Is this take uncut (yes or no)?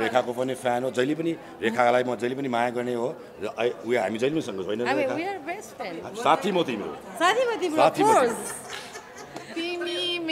yes